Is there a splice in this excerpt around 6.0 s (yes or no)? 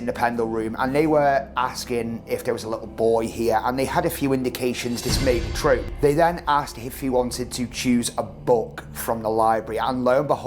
yes